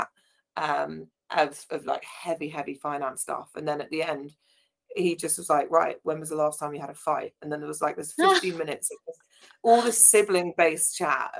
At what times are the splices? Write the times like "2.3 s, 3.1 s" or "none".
none